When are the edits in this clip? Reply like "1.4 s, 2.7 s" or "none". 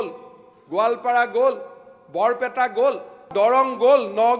3.3 s